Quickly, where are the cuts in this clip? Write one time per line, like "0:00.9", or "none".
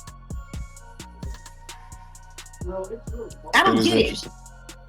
none